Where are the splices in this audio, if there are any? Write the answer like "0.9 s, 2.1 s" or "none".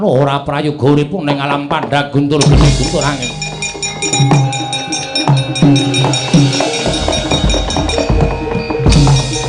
4.1 s